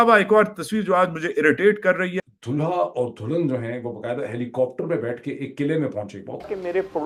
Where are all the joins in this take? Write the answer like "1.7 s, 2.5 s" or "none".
none